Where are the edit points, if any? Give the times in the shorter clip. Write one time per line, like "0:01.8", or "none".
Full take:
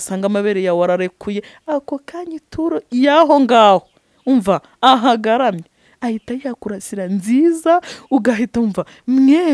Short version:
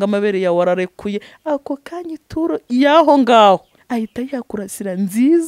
0:03.8